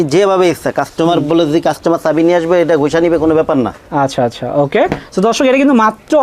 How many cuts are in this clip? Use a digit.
0